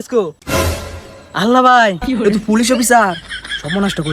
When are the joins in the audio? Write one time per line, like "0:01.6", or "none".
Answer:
none